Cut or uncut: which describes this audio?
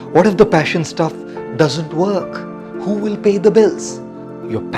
uncut